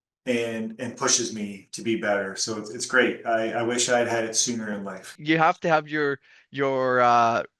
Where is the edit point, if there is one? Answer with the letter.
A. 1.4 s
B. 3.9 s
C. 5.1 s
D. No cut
C